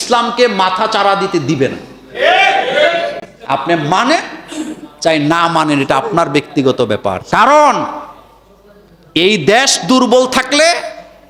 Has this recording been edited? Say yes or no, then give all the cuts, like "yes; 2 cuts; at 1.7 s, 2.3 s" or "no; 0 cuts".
no; 0 cuts